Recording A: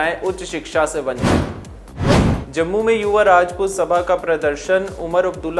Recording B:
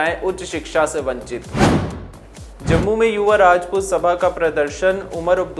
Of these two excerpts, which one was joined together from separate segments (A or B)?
B